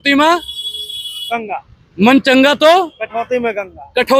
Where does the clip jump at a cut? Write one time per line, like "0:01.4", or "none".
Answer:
none